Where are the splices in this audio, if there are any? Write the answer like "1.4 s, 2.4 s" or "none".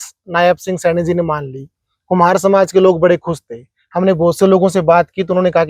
none